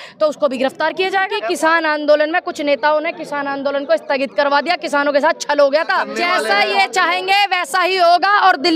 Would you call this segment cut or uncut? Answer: cut